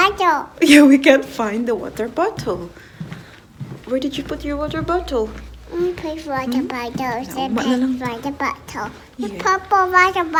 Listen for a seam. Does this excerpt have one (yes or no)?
no